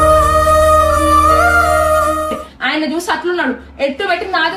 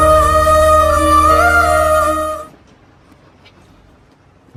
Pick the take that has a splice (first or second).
first